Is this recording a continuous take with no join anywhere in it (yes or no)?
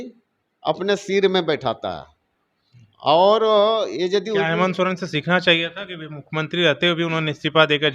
yes